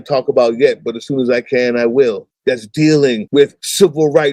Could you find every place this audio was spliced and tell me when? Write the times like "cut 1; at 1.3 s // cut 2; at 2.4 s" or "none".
cut 1; at 2.3 s // cut 2; at 3.3 s

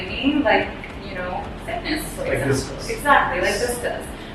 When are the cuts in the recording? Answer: none

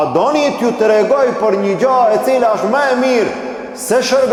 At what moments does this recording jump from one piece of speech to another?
none

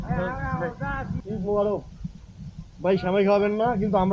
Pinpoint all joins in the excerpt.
cut 1; at 1.2 s

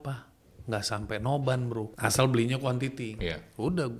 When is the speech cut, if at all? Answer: cut 1; at 1.9 s

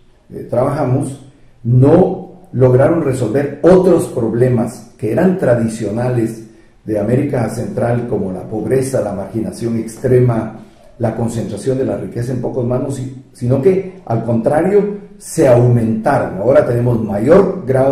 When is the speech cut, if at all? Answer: none

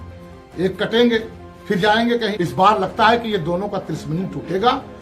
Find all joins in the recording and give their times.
cut 1; at 2.3 s

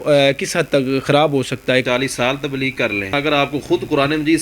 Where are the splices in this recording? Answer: cut 1; at 1.8 s // cut 2; at 3.1 s

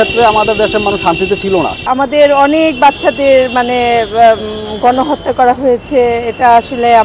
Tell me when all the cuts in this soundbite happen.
cut 1; at 1.8 s

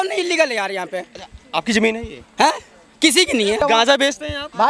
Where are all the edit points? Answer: cut 1; at 3.6 s

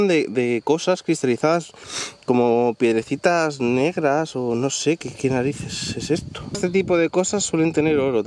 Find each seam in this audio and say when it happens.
cut 1; at 6.6 s

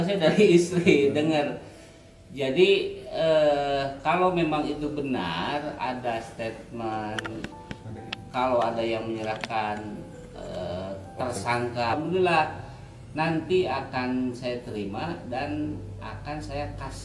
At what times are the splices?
cut 1; at 12.0 s

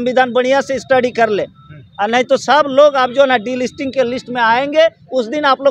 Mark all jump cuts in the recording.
none

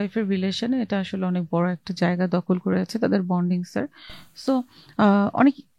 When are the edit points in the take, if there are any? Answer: none

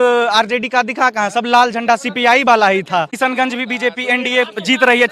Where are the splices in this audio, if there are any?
cut 1; at 3.1 s

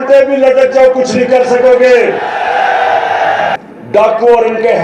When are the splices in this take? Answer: cut 1; at 3.5 s

